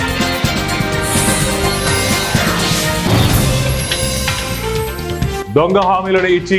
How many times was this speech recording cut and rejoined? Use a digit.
1